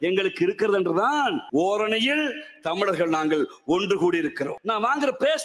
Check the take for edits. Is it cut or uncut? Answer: cut